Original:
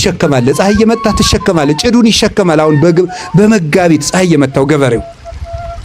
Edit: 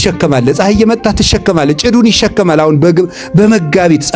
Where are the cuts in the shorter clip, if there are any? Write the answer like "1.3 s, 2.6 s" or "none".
none